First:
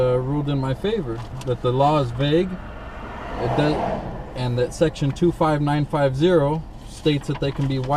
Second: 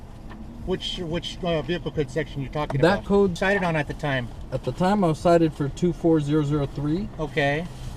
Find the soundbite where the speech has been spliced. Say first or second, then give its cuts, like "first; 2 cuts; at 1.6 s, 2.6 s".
second; 1 cut; at 3.3 s